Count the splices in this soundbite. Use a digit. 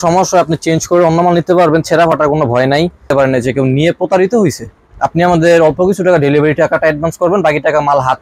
1